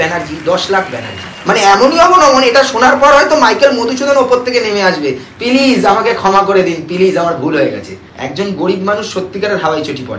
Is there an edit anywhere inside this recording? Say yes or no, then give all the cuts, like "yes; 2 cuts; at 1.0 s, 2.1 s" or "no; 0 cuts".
yes; 2 cuts; at 1.3 s, 7.5 s